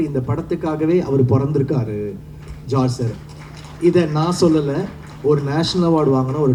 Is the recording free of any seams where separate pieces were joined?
yes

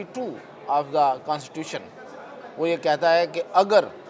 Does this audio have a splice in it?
no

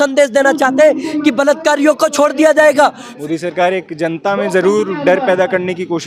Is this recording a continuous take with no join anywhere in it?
no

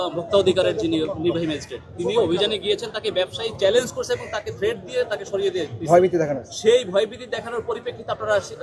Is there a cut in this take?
no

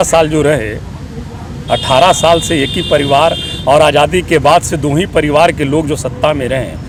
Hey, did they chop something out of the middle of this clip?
no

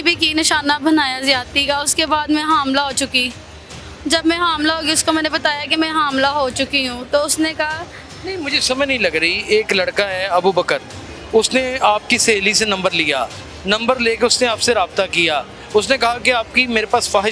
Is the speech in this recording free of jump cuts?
yes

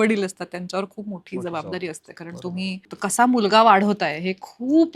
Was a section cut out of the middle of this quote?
yes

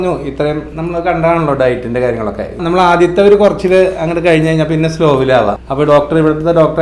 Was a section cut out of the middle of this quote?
yes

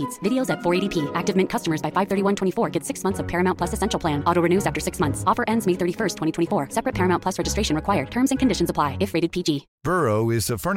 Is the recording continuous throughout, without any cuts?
yes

